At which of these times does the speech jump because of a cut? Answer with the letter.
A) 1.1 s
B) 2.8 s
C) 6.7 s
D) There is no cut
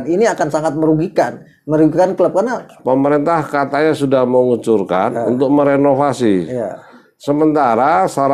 B